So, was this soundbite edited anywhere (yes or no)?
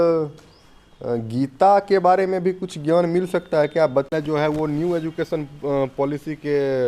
yes